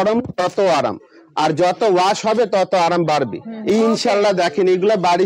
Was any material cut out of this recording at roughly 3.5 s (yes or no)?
yes